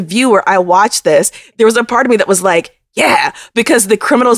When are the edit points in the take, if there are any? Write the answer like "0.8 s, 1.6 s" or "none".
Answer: 1.4 s

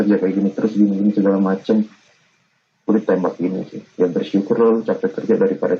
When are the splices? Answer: none

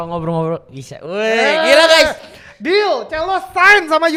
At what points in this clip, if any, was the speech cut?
none

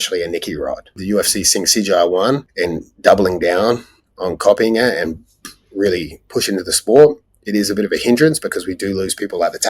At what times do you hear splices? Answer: 0.9 s, 2.5 s

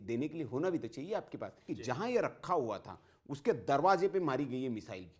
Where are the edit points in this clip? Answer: 1.6 s

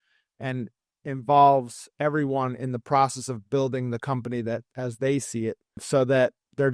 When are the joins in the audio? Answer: 5.8 s

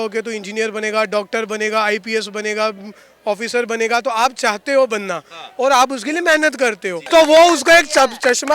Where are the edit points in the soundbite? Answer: 7.0 s

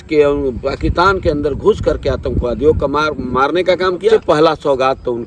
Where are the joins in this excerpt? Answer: 4.1 s

